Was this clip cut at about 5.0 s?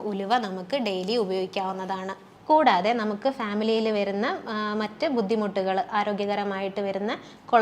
no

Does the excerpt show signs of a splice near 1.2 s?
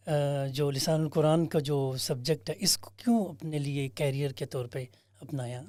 no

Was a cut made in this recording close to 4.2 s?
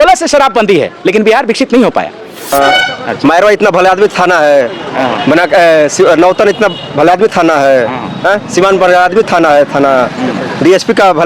no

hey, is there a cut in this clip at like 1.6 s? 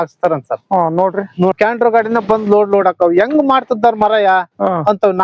yes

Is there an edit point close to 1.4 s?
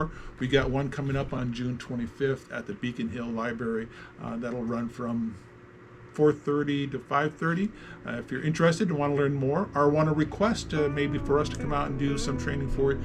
yes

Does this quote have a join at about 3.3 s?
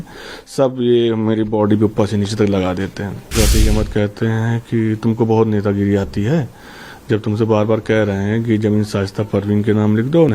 yes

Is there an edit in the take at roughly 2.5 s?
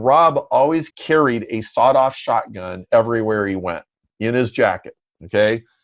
no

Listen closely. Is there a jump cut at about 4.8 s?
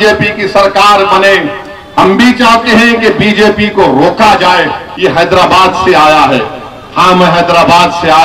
yes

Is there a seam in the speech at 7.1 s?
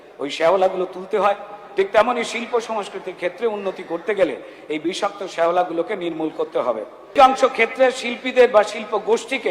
yes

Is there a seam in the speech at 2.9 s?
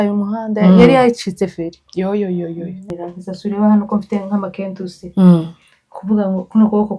yes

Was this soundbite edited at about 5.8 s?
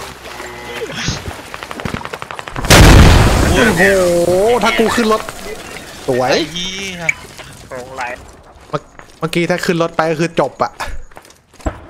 no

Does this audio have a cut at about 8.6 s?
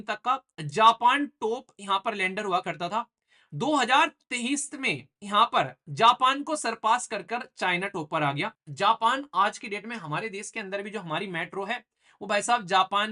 yes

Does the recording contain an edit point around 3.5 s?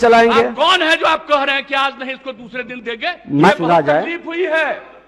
yes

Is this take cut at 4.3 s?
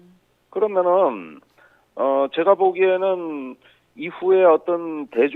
yes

